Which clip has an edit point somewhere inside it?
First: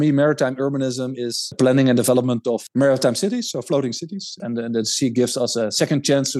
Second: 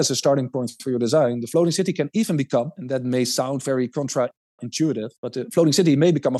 first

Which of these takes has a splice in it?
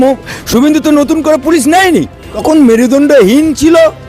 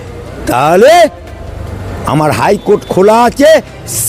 first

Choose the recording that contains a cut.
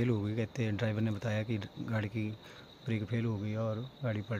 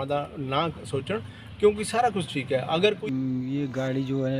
second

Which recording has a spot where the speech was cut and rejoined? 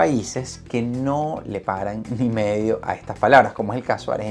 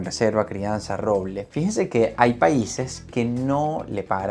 second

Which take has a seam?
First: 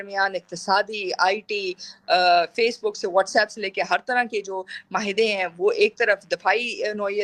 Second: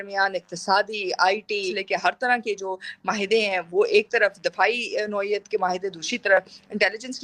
second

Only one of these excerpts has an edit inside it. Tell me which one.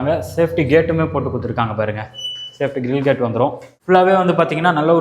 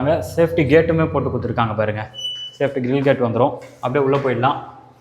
first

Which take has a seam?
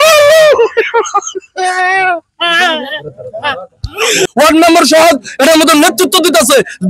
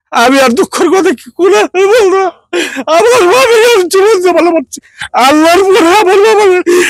first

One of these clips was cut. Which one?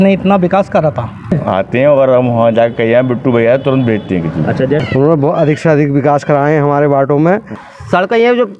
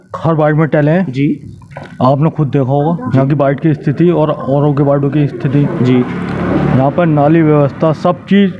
first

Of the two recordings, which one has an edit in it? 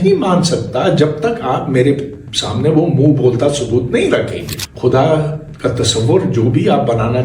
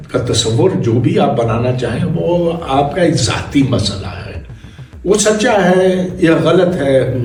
first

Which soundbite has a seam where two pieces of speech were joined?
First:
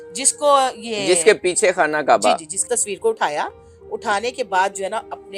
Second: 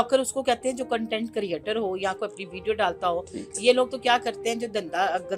first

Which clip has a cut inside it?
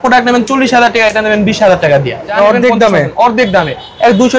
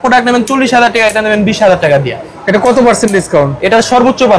first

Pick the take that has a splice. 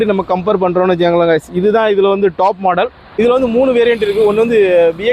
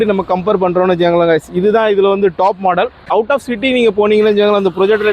second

